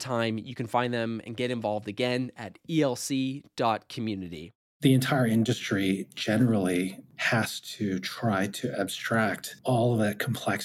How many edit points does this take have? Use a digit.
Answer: 2